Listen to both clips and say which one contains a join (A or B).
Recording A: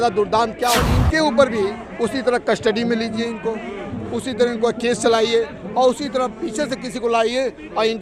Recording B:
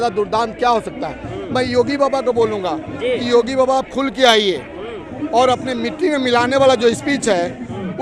A